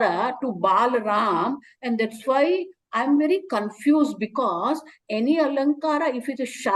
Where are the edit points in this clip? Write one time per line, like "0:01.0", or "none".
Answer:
none